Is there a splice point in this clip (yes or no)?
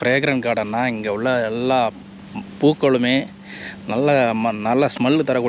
no